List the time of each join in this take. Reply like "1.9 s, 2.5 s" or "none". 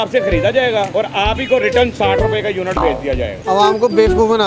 0.9 s, 3.4 s